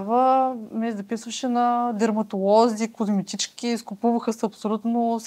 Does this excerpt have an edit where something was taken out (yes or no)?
no